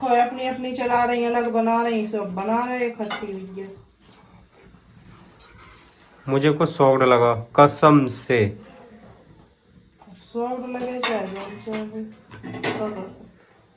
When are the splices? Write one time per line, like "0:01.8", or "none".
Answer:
none